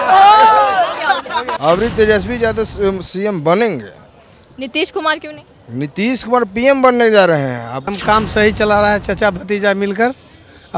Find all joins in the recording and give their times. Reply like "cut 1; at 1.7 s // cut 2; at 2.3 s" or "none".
cut 1; at 1.5 s // cut 2; at 7.9 s